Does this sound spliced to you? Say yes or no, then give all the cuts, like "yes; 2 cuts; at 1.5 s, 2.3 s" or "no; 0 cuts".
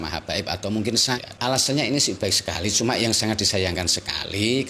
yes; 1 cut; at 1.2 s